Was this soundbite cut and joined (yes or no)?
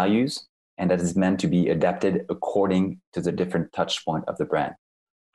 no